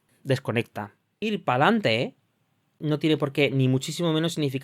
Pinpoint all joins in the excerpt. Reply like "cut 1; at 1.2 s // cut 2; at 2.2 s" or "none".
cut 1; at 1.1 s